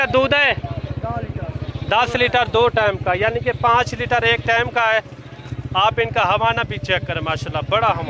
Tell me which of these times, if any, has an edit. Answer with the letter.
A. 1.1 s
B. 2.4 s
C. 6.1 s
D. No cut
D